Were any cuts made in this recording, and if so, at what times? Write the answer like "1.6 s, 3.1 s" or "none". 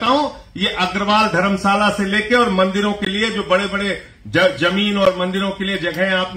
none